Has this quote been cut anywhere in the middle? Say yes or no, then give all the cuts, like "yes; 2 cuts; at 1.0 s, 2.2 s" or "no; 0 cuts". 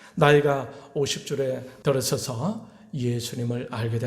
yes; 1 cut; at 1.7 s